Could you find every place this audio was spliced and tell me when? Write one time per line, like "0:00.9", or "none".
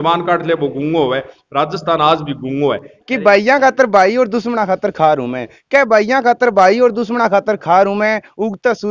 0:02.9